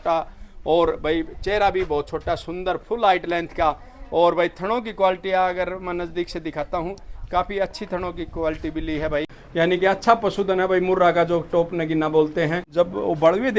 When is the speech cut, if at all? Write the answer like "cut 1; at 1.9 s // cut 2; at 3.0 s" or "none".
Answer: cut 1; at 9.4 s // cut 2; at 12.6 s

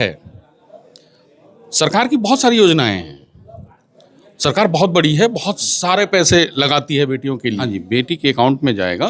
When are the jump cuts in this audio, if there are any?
cut 1; at 7.6 s

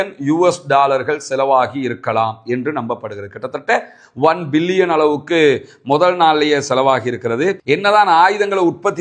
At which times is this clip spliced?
cut 1; at 7.7 s

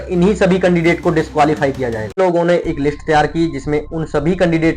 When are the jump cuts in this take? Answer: cut 1; at 2.2 s

